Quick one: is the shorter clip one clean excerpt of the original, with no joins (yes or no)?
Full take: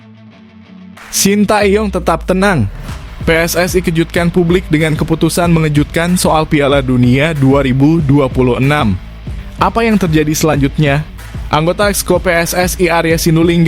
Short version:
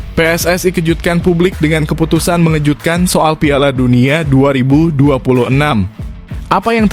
yes